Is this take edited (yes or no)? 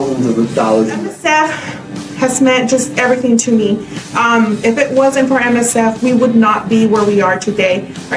yes